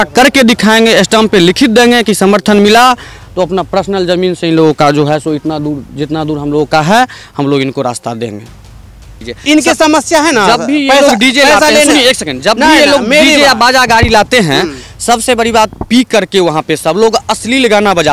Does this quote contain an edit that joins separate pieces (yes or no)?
yes